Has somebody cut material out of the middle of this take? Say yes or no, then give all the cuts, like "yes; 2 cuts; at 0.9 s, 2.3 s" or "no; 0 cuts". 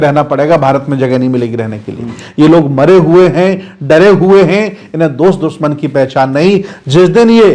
yes; 1 cut; at 2.2 s